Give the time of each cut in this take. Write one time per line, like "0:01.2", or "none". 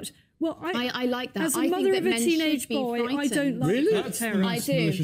0:01.5